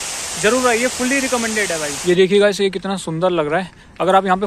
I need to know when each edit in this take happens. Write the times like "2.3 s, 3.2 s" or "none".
1.9 s